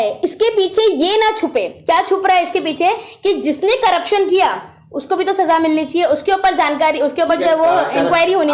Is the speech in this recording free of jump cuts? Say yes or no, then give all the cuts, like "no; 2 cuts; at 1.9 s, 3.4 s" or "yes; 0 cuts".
yes; 0 cuts